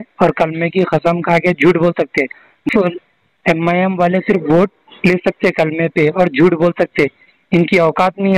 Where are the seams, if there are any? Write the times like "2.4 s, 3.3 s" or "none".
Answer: 2.7 s